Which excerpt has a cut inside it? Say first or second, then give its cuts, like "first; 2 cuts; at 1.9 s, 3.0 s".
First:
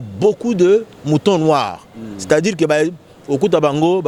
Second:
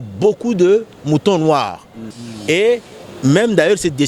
second; 1 cut; at 2.1 s